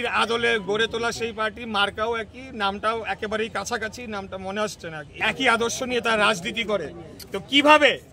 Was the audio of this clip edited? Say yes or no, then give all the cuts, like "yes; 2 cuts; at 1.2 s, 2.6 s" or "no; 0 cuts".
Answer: yes; 1 cut; at 5.2 s